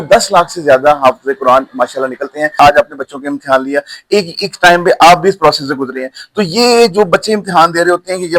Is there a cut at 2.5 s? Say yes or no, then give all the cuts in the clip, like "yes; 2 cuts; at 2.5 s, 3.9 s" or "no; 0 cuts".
yes; 1 cut; at 2.5 s